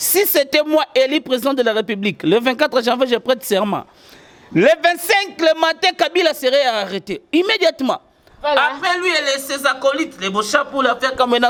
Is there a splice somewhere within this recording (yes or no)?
no